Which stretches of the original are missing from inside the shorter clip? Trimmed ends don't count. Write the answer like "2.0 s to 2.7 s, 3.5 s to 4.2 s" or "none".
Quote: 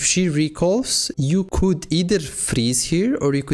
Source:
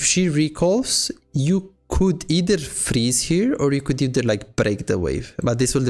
1.3 s to 1.7 s